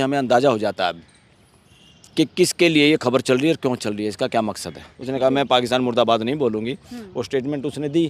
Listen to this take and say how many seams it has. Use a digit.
1